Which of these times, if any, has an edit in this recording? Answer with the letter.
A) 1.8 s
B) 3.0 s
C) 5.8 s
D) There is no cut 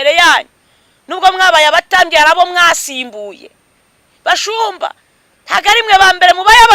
D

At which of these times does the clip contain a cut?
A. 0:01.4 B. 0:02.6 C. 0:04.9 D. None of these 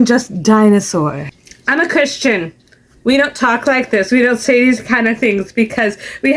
A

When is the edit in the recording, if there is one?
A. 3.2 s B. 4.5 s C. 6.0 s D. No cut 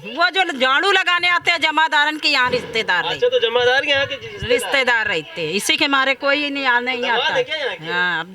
D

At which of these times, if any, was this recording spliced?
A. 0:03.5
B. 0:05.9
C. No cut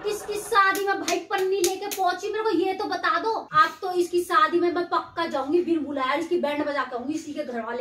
A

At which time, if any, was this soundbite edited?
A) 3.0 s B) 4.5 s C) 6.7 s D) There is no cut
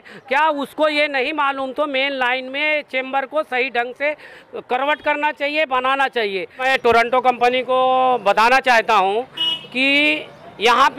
C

